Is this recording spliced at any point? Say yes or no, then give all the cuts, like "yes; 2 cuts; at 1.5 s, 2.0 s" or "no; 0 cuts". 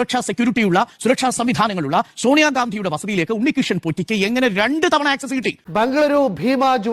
yes; 1 cut; at 5.6 s